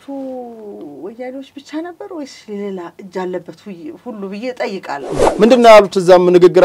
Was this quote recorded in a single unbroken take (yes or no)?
no